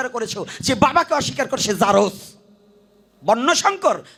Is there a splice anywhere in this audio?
no; 0 cuts

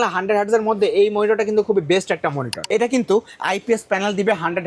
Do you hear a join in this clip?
yes; 1 cut; at 2.5 s

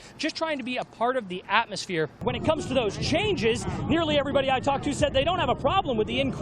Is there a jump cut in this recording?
yes; 1 cut; at 2.2 s

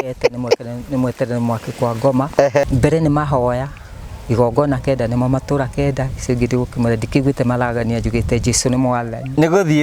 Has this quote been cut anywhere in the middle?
yes; 1 cut; at 2.6 s

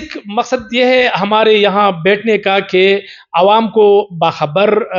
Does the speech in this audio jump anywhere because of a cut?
no; 0 cuts

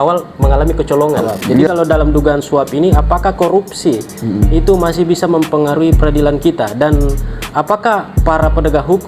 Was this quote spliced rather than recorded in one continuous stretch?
yes; 1 cut; at 1.7 s

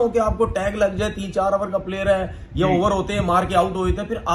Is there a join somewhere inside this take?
no; 0 cuts

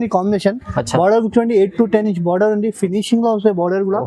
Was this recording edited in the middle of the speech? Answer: no; 0 cuts

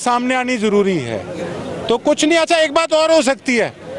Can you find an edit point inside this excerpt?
no; 0 cuts

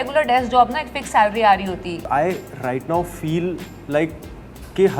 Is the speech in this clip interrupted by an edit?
yes; 1 cut; at 2.0 s

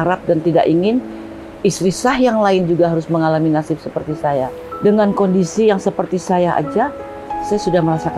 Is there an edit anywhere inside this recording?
yes; 1 cut; at 4.6 s

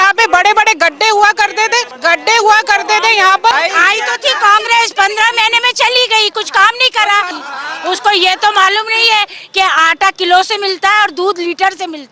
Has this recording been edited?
yes; 3 cuts; at 1.9 s, 3.5 s, 7.4 s

